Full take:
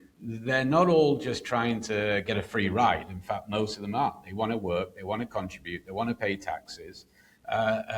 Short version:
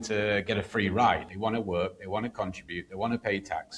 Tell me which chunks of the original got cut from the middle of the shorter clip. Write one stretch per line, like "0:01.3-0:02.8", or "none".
0:03.1-0:04.3